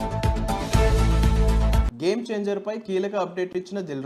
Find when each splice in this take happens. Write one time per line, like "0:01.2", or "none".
none